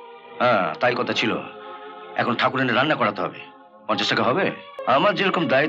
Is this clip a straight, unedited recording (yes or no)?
no